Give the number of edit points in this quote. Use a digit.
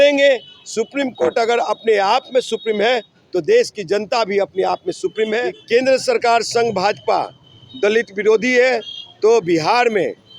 1